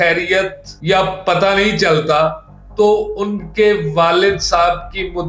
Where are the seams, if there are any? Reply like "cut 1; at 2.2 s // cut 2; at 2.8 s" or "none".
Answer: none